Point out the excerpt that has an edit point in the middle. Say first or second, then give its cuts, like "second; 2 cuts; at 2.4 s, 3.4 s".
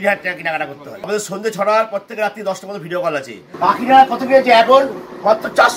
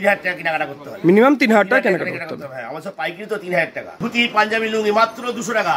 first; 2 cuts; at 1.0 s, 3.4 s